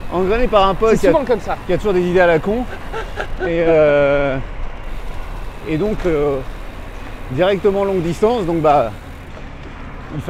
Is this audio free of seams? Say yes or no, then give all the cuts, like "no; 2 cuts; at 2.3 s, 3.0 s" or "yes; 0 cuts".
yes; 0 cuts